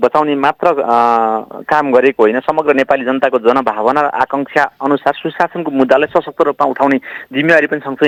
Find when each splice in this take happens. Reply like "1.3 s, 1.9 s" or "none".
none